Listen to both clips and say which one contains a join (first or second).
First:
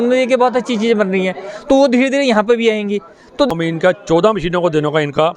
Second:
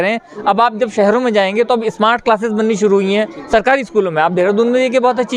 first